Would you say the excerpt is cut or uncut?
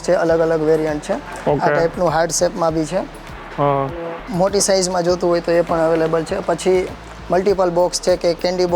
uncut